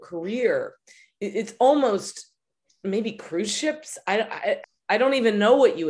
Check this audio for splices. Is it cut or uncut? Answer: cut